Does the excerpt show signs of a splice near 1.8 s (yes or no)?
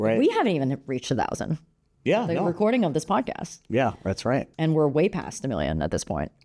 no